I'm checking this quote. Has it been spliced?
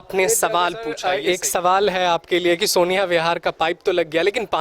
yes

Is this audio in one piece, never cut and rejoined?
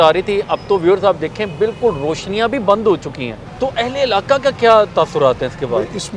yes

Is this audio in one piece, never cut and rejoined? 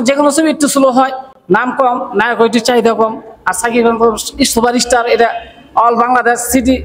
yes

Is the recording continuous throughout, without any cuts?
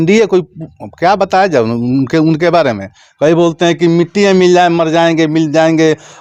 yes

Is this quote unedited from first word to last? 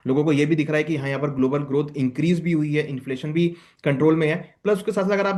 yes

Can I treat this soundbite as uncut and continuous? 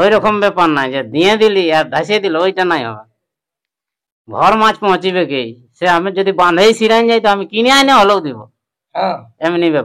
yes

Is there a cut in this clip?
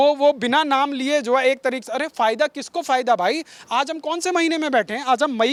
no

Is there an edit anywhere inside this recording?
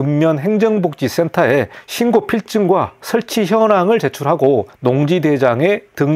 yes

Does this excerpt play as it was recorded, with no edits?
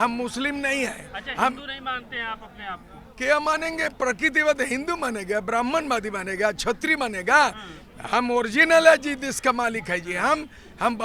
yes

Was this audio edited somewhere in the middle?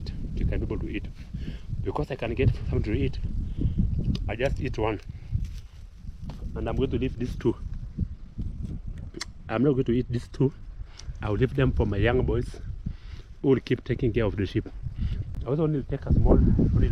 no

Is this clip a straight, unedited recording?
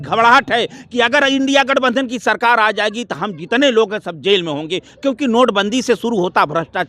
yes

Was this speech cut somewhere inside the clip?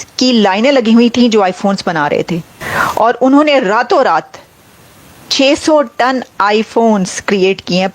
yes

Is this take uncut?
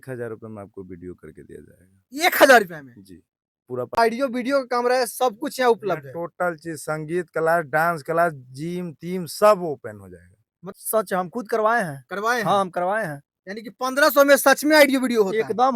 no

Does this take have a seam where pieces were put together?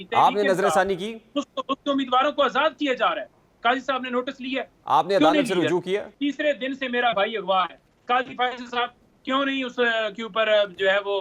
yes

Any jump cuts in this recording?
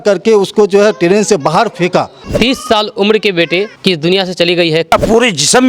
yes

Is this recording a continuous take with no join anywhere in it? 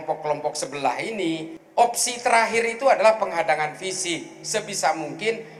yes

